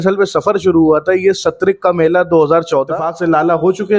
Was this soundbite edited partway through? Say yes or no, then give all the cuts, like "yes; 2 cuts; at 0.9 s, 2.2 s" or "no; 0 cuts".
yes; 1 cut; at 3.0 s